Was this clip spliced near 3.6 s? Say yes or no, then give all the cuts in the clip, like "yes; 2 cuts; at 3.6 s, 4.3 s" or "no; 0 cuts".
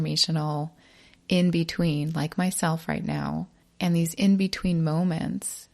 yes; 1 cut; at 3.6 s